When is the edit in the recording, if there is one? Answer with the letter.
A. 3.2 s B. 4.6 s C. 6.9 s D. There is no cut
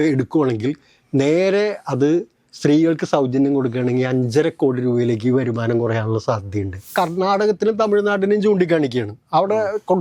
C